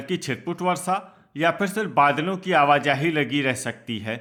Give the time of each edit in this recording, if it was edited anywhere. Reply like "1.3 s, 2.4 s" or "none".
none